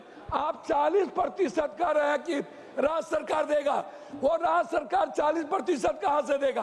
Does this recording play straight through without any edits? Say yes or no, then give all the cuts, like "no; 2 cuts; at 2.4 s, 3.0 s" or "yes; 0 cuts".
yes; 0 cuts